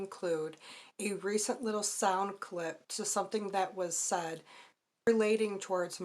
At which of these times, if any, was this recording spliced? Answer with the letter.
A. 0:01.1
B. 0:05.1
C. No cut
B